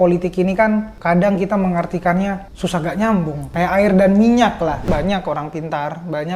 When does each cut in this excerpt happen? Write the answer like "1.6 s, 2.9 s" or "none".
0.9 s, 2.5 s, 3.5 s, 4.9 s

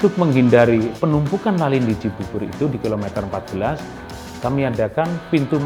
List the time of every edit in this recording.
none

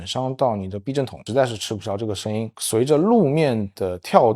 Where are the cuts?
1.2 s, 2.5 s

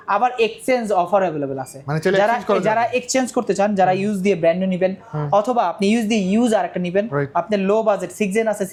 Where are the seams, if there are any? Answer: none

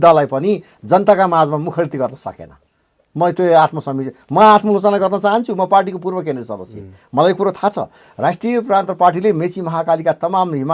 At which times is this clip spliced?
none

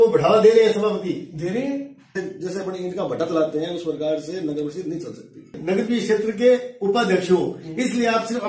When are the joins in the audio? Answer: 2.2 s, 5.6 s

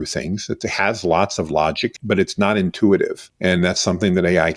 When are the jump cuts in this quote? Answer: 1.9 s, 3.3 s

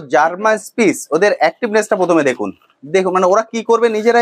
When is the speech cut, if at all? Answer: none

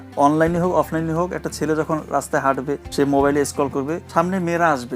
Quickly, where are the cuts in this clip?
2.9 s, 4.0 s

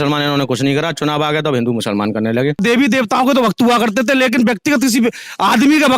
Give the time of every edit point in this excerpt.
2.6 s

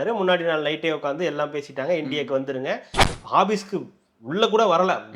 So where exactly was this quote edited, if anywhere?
3.0 s

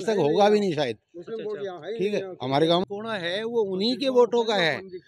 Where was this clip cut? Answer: 2.8 s

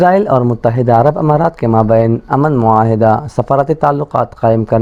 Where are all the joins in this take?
none

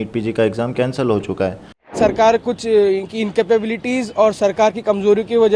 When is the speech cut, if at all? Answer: 1.9 s

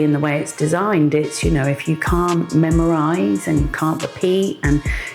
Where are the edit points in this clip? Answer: none

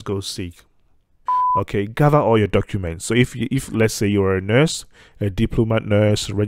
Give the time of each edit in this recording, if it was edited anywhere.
1.2 s

